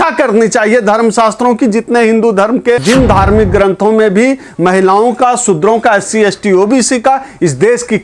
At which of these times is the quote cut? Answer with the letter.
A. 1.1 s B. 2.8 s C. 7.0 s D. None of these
B